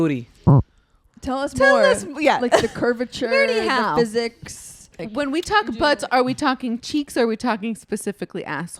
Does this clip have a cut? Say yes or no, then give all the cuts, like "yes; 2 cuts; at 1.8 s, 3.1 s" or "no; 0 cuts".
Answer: yes; 1 cut; at 4.9 s